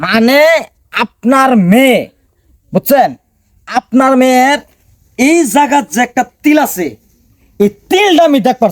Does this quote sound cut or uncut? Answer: uncut